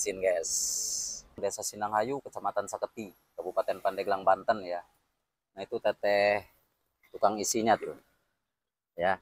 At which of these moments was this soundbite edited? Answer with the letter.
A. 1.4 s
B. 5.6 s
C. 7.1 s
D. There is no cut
A